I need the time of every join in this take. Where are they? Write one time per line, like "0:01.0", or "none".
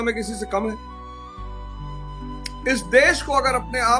0:00.8
0:02.6